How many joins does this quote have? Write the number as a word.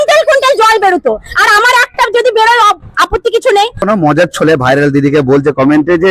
one